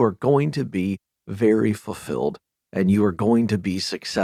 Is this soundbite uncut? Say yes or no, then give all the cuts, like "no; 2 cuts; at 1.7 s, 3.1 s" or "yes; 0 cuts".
yes; 0 cuts